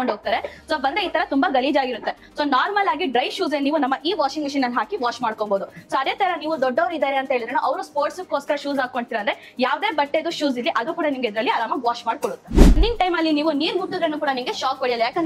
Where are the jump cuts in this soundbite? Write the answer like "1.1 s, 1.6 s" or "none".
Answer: 12.8 s